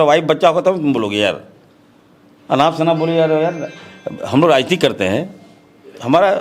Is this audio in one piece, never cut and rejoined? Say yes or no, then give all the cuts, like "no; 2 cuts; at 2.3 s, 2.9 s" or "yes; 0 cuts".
yes; 0 cuts